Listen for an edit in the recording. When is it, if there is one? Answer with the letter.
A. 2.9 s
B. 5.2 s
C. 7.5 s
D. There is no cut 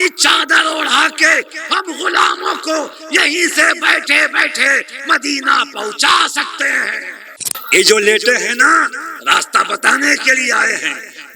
C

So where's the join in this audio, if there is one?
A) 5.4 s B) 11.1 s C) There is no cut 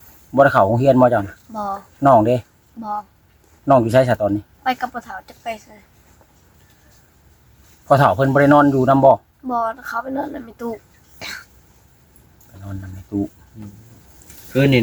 C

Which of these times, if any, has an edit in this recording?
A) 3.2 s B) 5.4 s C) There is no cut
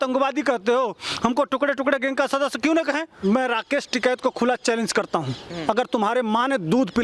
A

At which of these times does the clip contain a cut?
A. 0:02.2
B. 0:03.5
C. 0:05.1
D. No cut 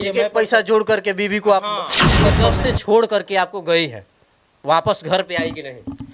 A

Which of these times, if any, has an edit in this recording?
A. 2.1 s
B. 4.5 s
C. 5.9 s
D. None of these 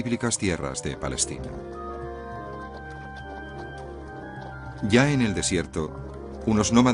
A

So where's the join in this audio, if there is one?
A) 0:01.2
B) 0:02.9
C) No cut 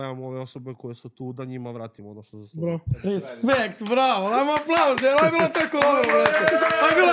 B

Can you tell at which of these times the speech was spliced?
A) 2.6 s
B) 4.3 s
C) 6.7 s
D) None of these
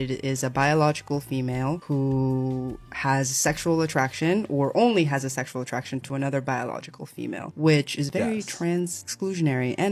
D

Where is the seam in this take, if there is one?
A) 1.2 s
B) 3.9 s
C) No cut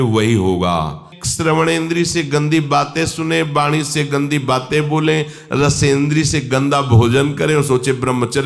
A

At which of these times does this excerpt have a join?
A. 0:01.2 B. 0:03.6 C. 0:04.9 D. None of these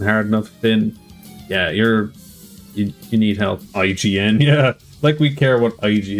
B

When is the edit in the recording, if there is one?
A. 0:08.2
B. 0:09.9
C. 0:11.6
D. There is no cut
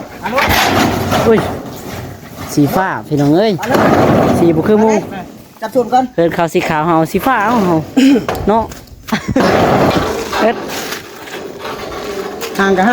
B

